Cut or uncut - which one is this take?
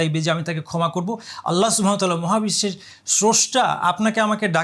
uncut